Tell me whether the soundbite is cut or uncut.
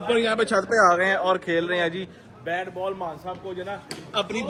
uncut